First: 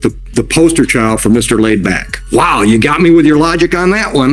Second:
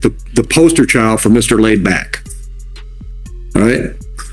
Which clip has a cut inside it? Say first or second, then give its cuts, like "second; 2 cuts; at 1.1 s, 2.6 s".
first; 1 cut; at 2.2 s